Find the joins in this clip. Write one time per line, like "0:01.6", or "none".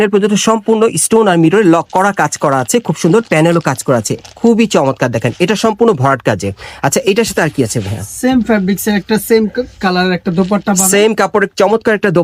none